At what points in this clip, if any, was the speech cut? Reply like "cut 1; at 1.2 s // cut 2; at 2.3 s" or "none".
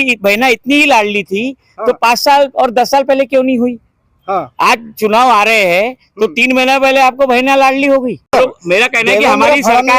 cut 1; at 8.3 s